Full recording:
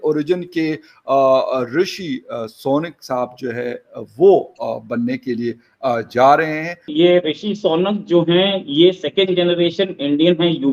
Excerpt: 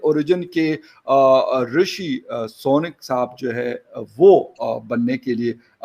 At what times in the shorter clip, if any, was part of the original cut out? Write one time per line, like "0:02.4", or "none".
none